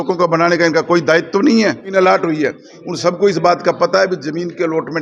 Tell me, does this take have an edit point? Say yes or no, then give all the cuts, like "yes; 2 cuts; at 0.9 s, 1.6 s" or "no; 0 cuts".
yes; 1 cut; at 1.9 s